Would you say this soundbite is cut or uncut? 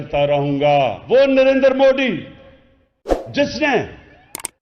cut